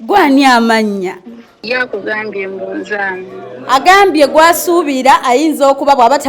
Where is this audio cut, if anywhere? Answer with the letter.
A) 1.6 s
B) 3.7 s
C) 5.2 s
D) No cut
A